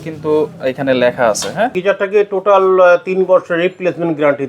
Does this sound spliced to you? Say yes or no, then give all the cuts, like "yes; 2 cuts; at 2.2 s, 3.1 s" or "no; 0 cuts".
yes; 1 cut; at 1.8 s